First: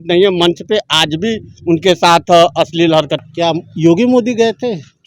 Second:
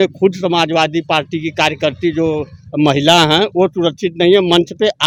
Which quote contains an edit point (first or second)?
first